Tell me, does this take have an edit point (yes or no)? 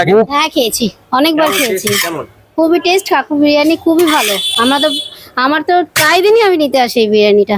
no